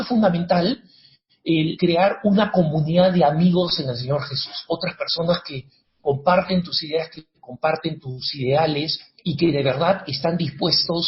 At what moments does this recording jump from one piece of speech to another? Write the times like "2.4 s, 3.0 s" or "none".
1.8 s, 8.0 s, 9.0 s